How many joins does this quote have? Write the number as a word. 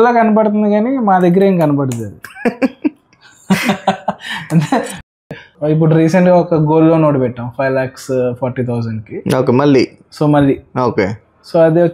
one